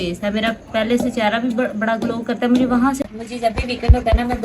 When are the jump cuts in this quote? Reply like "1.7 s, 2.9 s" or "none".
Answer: 3.0 s